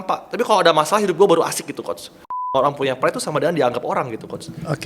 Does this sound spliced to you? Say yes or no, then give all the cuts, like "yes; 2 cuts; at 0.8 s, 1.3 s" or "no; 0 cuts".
yes; 1 cut; at 2.3 s